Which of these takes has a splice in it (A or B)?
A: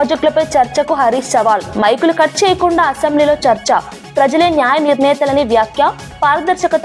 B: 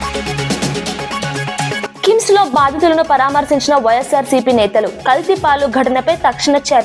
B